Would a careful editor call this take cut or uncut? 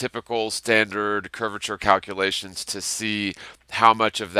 cut